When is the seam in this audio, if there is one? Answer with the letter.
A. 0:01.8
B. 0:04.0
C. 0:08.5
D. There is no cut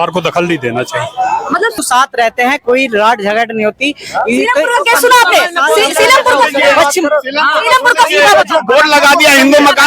A